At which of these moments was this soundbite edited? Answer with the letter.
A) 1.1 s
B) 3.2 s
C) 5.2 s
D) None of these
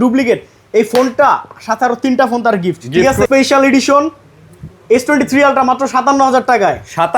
B